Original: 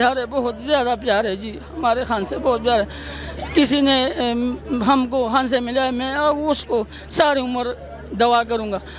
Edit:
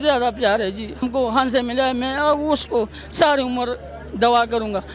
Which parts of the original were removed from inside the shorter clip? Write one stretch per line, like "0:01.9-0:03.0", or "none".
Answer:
0:01.7-0:05.0